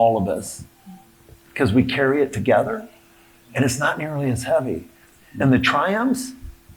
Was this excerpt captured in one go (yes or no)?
yes